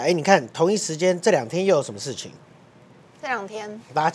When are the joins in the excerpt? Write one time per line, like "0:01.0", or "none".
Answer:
none